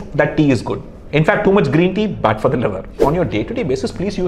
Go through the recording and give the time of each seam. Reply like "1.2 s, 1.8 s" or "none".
3.0 s

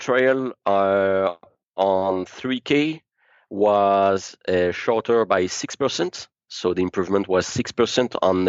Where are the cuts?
none

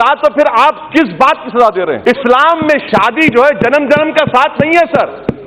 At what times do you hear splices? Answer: 2.0 s

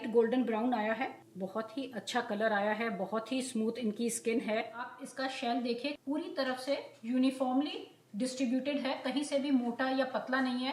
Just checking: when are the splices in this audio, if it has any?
1.3 s, 4.8 s, 6.0 s

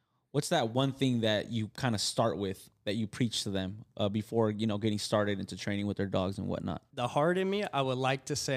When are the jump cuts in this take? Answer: 6.9 s

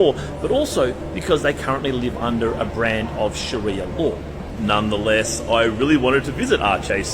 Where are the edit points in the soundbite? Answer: 4.4 s

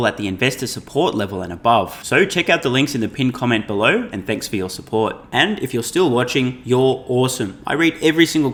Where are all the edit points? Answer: none

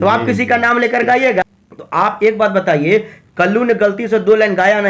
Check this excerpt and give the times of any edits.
1.4 s

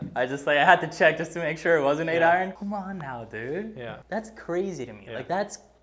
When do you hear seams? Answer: 2.5 s, 3.9 s

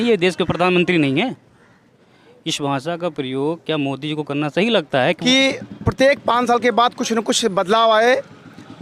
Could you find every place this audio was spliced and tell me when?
5.2 s

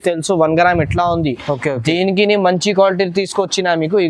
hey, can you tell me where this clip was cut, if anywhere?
none

